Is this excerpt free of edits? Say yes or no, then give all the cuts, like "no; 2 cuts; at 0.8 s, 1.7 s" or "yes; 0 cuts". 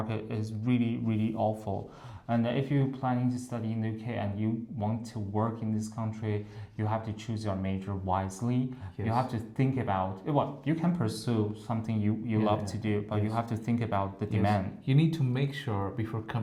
yes; 0 cuts